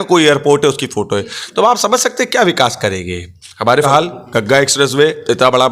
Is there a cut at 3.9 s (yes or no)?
yes